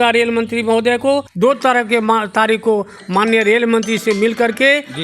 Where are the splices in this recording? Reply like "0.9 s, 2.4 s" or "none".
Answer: 1.3 s